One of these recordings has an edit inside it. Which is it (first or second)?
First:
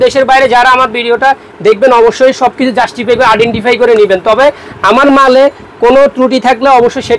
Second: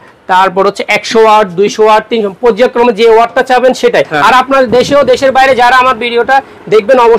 second